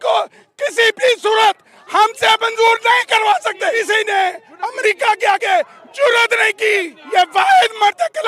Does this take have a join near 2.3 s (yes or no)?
no